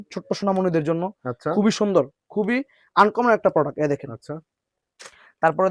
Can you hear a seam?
no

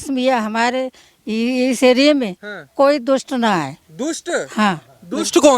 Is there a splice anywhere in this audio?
yes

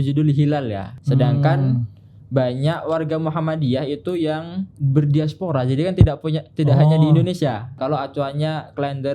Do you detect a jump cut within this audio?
yes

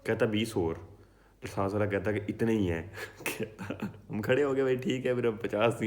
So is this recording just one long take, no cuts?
no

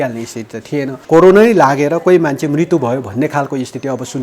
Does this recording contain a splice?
yes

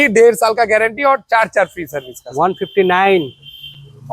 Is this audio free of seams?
yes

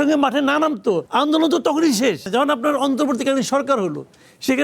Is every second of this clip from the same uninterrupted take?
no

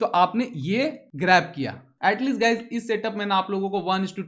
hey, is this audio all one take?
no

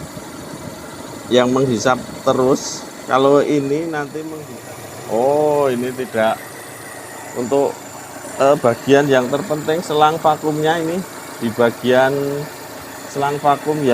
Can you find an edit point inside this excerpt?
yes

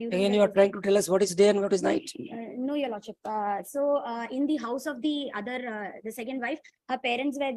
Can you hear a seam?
no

